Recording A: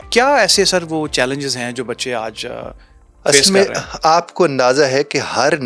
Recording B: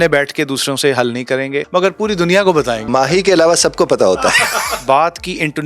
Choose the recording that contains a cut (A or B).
B